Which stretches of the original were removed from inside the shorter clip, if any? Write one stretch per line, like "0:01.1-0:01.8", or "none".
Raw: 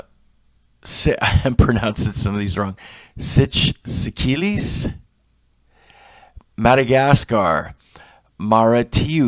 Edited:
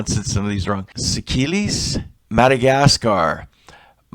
0:02.9-0:03.9
0:05.1-0:06.4